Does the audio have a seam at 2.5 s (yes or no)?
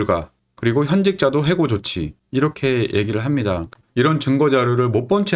no